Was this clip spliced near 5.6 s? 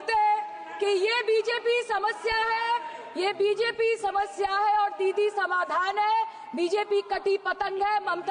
no; 0 cuts

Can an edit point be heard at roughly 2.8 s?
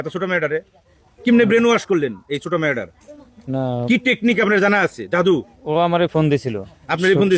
no; 0 cuts

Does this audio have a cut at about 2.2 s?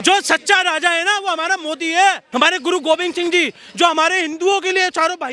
yes; 1 cut; at 2.2 s

